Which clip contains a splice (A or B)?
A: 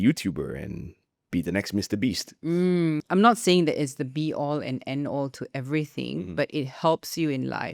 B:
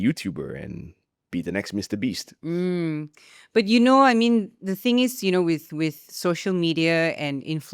A